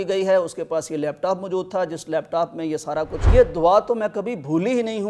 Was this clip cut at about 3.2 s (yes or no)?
yes